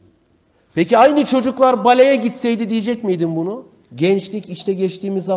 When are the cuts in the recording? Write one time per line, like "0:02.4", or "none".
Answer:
0:03.6